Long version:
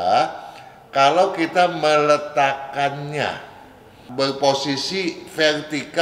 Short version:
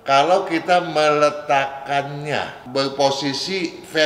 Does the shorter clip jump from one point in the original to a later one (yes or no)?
yes